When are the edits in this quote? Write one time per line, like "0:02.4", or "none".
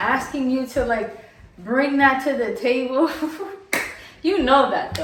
none